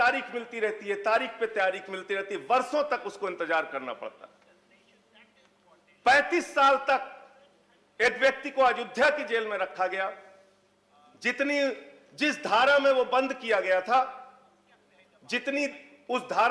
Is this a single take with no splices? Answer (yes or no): yes